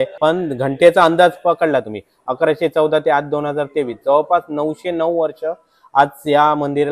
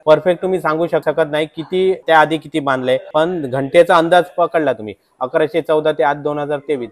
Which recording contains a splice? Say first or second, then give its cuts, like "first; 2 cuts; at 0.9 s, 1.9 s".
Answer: second; 2 cuts; at 1.0 s, 2.0 s